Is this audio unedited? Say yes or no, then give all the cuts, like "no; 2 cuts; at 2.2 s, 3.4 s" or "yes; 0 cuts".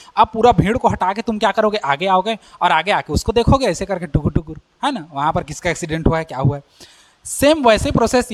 yes; 0 cuts